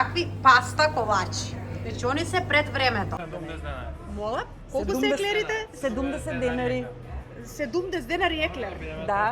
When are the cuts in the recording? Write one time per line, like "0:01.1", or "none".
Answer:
0:03.2

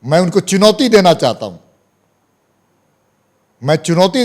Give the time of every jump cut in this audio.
none

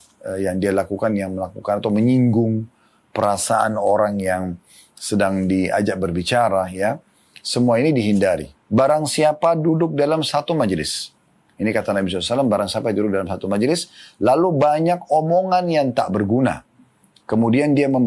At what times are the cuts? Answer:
0:08.5

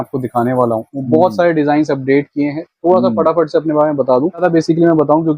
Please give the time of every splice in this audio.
0:04.4

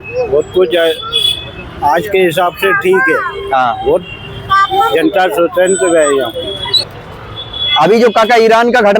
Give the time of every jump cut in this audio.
none

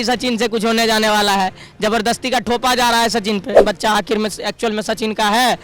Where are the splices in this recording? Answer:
0:03.6

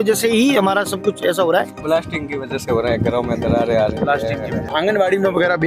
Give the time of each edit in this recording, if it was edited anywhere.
0:01.7
0:04.7

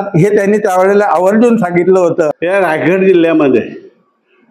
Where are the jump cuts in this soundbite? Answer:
0:02.4

